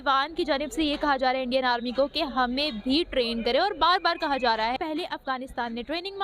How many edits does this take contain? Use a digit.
1